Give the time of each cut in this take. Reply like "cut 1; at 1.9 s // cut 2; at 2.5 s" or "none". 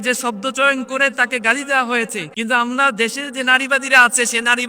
cut 1; at 2.2 s